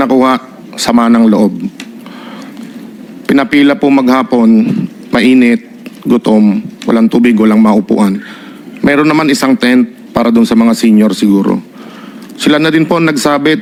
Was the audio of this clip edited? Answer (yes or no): no